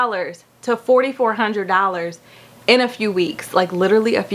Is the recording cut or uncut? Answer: uncut